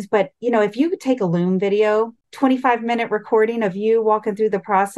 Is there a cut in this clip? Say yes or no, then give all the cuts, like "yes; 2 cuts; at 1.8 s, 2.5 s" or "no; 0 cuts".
yes; 1 cut; at 2.2 s